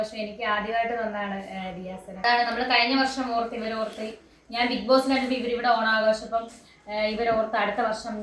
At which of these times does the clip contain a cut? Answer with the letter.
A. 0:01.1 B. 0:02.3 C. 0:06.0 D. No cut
B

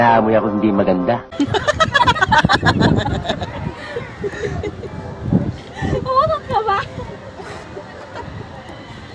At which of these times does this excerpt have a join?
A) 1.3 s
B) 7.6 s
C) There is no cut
A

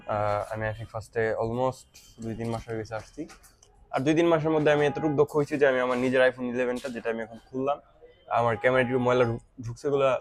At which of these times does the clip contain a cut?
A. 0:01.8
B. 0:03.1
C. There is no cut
C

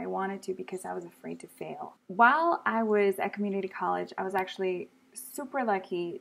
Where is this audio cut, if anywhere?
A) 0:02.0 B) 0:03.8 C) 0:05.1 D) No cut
A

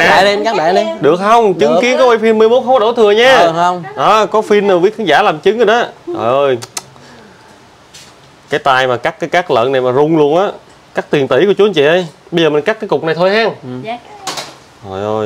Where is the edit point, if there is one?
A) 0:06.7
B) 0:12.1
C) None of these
C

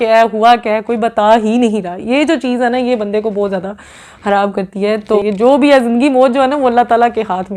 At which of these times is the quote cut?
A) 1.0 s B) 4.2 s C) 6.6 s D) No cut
D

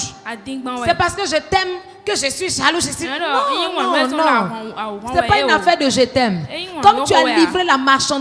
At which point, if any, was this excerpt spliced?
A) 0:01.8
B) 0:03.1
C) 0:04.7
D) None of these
D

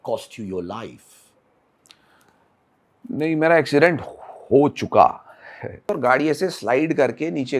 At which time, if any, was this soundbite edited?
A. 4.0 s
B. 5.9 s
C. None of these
B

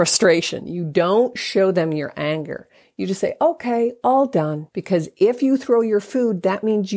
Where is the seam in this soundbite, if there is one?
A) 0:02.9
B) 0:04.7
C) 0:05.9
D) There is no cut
B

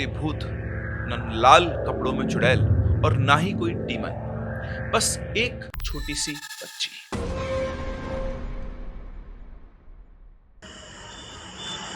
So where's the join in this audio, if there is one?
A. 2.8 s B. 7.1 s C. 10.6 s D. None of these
C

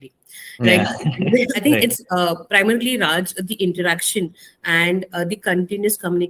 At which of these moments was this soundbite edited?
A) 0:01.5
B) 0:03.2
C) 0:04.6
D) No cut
A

